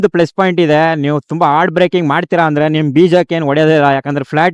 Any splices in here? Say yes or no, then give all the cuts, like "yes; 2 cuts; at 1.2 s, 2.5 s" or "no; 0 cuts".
no; 0 cuts